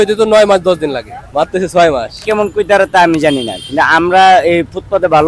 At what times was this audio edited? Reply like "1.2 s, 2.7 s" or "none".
1.1 s, 2.2 s